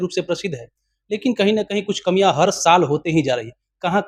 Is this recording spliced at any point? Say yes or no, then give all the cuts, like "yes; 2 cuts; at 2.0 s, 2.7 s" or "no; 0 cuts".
no; 0 cuts